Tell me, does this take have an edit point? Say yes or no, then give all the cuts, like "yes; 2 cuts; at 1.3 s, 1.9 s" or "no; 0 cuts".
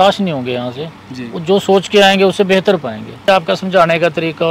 yes; 1 cut; at 3.2 s